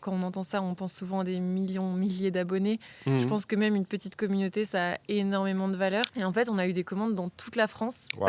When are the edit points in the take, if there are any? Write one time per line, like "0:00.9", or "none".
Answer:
0:06.1